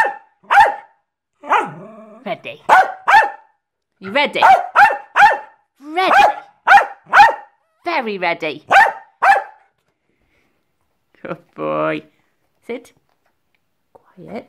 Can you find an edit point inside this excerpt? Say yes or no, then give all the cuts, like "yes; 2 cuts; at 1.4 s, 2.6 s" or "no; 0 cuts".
no; 0 cuts